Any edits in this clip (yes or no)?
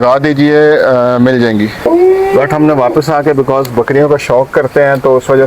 yes